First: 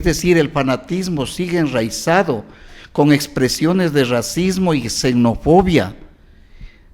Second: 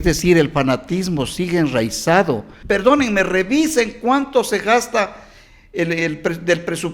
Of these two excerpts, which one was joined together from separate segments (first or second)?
second